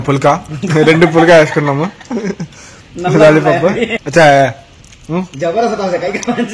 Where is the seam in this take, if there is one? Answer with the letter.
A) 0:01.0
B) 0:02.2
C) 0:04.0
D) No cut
C